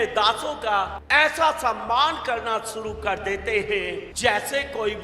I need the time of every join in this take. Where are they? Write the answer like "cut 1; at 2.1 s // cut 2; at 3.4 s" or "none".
cut 1; at 1.0 s // cut 2; at 4.1 s